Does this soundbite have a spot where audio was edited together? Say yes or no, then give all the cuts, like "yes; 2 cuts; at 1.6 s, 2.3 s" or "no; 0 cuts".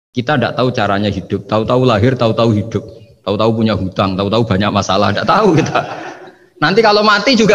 no; 0 cuts